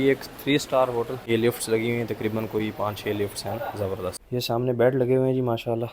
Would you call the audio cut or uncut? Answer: cut